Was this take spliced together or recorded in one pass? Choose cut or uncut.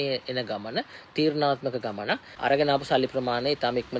cut